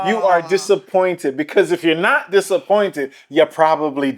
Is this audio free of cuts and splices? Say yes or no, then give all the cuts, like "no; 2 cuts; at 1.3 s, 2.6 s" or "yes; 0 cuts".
yes; 0 cuts